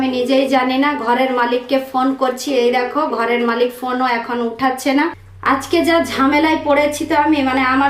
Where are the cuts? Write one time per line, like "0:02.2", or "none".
0:05.2